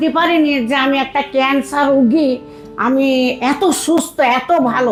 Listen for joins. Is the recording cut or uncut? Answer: uncut